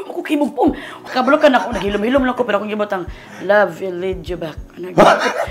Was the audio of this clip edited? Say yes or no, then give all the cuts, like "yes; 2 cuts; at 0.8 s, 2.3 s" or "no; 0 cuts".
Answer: yes; 1 cut; at 1.0 s